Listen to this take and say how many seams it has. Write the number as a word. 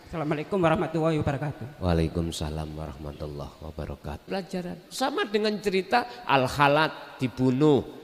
one